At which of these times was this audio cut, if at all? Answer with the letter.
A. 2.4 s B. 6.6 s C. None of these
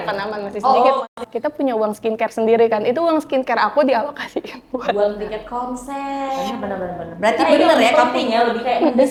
C